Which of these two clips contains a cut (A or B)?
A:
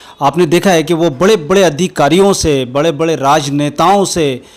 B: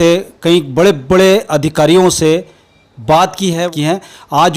B